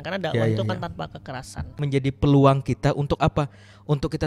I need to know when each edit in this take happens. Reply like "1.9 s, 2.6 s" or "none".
1.8 s